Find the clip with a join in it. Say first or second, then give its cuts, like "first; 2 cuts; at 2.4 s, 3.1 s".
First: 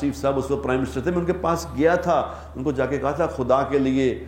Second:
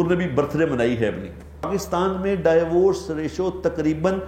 second; 1 cut; at 1.7 s